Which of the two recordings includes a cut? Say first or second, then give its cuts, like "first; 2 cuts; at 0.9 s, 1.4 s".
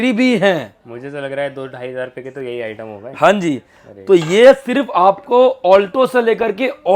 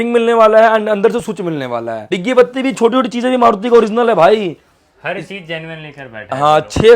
second; 1 cut; at 2.1 s